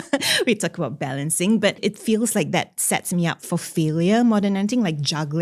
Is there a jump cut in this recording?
yes; 1 cut; at 1.8 s

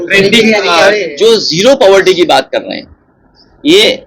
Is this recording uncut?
no; 1 cut; at 1.1 s

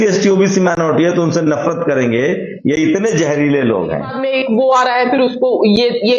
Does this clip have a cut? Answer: yes; 1 cut; at 4.2 s

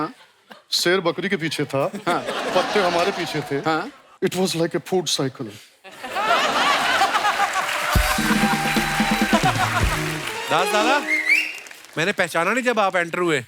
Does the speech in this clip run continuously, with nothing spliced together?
no; 1 cut; at 10.2 s

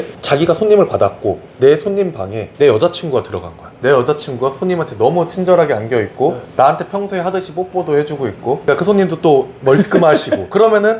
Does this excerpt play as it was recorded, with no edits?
no; 1 cut; at 3.6 s

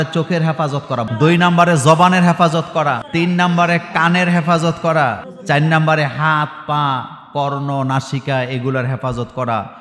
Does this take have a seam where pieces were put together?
yes; 3 cuts; at 1.0 s, 3.0 s, 5.3 s

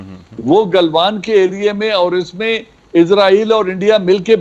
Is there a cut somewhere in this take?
no; 0 cuts

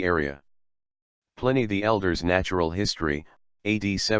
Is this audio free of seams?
no; 1 cut; at 2.5 s

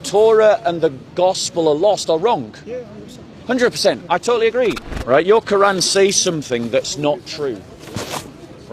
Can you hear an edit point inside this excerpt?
yes; 1 cut; at 4.8 s

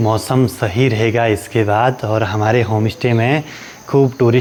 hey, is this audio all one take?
yes; 0 cuts

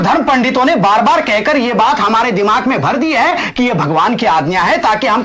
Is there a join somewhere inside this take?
no; 0 cuts

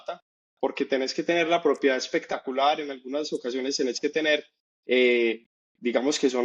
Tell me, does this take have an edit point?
no; 0 cuts

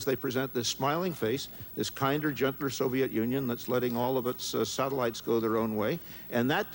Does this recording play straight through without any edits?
yes; 0 cuts

